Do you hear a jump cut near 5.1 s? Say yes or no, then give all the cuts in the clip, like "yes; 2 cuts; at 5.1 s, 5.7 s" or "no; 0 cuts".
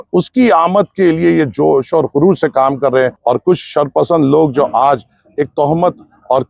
no; 1 cut; at 3.2 s